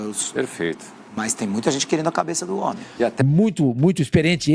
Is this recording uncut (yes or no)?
no